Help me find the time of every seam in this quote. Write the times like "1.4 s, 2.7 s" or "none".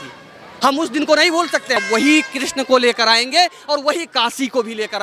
1.8 s